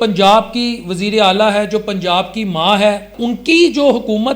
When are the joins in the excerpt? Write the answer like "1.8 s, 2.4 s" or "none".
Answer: 3.1 s

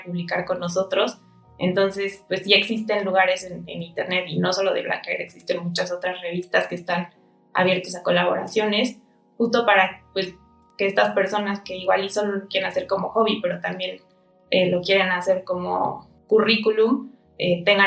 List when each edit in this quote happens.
16.1 s

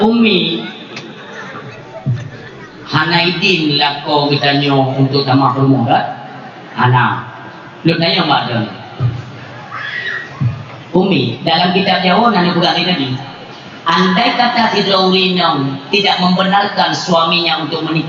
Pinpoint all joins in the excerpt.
none

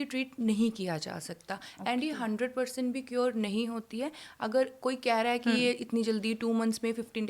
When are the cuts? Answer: none

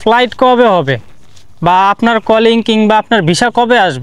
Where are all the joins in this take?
none

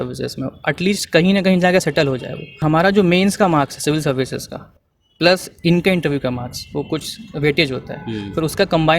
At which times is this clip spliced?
2.6 s

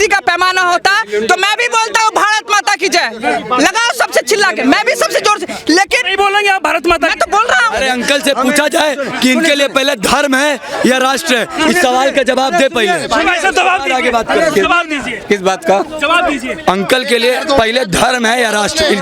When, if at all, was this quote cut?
7.8 s

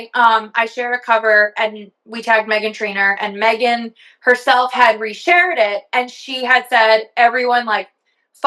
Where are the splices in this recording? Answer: none

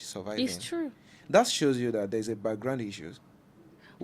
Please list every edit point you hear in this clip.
1.1 s

